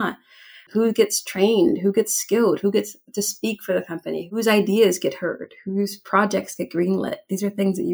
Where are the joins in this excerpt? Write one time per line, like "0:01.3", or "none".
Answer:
none